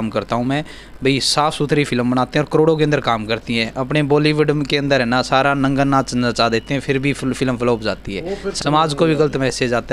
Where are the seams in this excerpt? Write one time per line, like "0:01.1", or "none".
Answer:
0:08.5